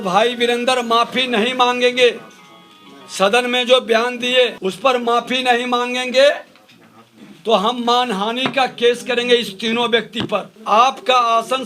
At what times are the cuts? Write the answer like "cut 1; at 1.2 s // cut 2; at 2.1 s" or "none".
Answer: cut 1; at 4.6 s // cut 2; at 10.5 s